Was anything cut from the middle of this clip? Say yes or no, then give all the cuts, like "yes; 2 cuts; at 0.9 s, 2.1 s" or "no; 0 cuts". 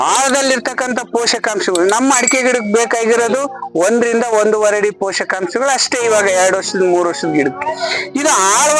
no; 0 cuts